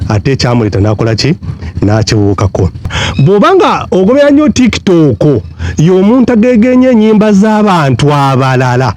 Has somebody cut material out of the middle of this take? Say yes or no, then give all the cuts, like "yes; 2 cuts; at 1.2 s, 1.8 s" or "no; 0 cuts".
yes; 1 cut; at 3.0 s